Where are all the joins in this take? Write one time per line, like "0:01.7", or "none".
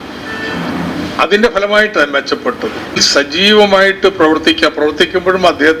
0:03.0